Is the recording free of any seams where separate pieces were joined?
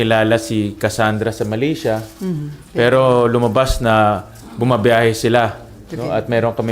yes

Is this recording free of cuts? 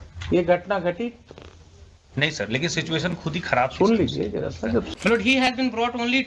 no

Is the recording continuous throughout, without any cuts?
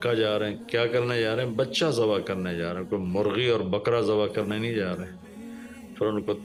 yes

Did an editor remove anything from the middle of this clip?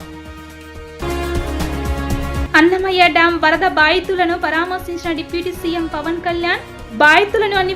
no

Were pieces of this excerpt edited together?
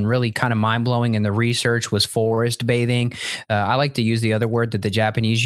no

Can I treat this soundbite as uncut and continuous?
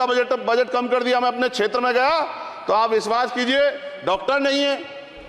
yes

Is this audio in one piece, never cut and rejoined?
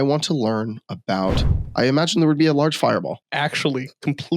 no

